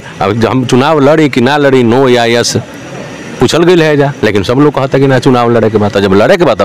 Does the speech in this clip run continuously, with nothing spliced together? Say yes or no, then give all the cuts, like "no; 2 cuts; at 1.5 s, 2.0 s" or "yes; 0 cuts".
yes; 0 cuts